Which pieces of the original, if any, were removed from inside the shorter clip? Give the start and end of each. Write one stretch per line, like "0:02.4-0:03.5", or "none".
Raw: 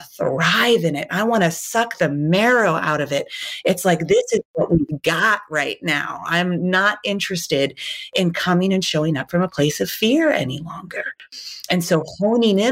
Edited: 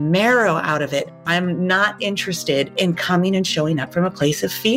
0:03.4-0:06.2
0:07.7-0:08.1